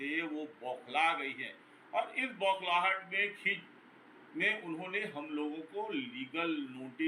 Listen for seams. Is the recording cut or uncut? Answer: uncut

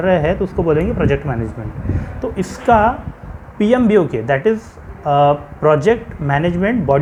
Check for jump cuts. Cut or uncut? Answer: uncut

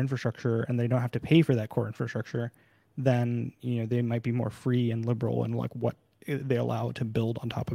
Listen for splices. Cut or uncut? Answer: uncut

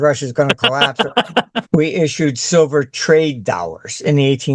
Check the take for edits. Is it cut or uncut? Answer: cut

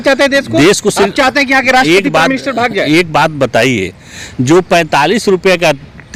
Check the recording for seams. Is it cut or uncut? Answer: uncut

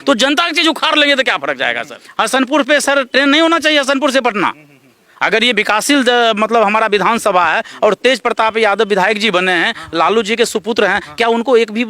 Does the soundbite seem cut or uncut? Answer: cut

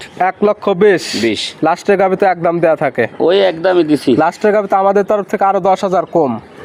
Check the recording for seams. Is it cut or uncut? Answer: uncut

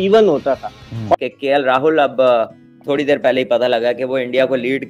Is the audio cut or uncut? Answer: cut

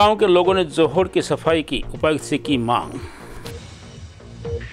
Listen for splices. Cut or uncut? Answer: cut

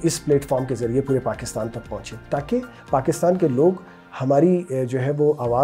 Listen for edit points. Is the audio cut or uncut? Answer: uncut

